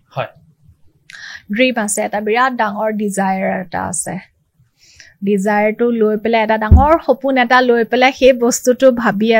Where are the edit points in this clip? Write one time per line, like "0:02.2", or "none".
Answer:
none